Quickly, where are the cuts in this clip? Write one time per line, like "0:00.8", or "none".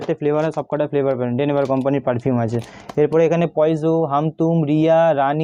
none